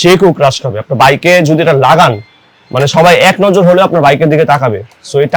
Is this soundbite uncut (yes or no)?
yes